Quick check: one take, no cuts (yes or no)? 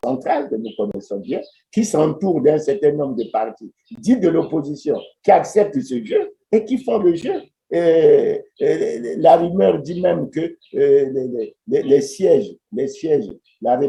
yes